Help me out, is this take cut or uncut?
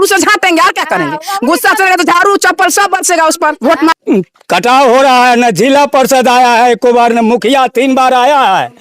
cut